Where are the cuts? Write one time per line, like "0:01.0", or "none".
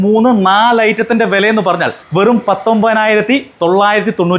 0:02.0